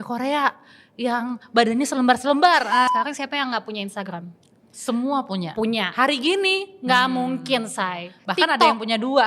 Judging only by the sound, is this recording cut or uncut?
cut